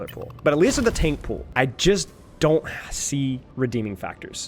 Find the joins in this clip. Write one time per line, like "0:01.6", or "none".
0:01.4
0:03.5

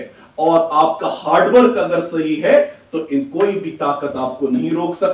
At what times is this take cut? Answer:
none

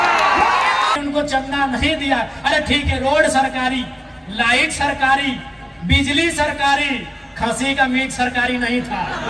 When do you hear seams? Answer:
0:01.0

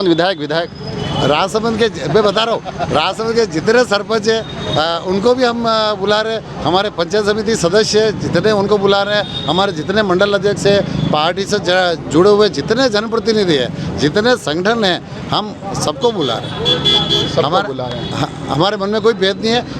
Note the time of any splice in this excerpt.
none

